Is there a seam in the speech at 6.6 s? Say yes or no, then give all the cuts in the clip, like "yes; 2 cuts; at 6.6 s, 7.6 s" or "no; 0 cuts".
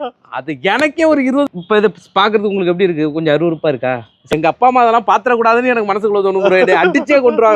no; 2 cuts; at 1.5 s, 4.3 s